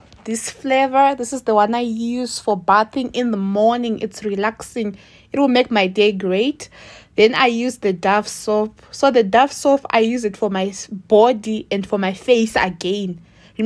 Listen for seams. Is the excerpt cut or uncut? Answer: uncut